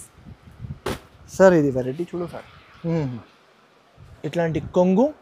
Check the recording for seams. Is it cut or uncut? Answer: cut